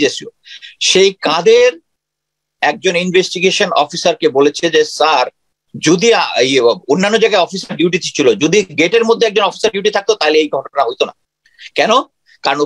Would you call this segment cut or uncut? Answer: uncut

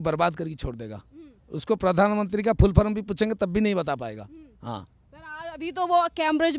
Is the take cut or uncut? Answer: uncut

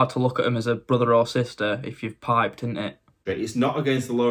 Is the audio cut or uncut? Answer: cut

